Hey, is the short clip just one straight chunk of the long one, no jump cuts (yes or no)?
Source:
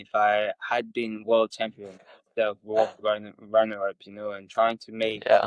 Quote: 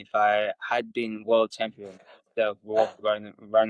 yes